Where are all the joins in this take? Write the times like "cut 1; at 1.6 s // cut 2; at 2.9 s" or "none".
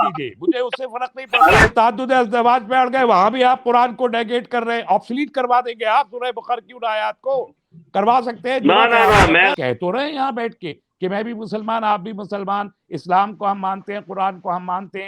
cut 1; at 1.7 s // cut 2; at 9.5 s